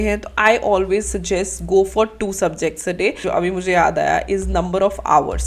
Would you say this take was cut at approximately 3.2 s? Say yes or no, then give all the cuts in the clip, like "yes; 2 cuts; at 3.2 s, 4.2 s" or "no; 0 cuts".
yes; 1 cut; at 3.2 s